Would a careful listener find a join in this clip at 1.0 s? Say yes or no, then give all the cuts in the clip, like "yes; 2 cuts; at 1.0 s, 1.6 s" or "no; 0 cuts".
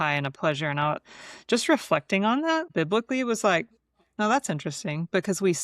no; 1 cut; at 2.7 s